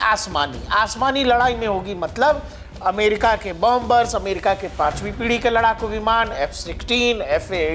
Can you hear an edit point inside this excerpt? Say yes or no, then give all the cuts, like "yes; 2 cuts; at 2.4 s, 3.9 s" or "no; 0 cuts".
no; 0 cuts